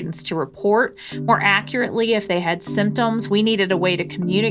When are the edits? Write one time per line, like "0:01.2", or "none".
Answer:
none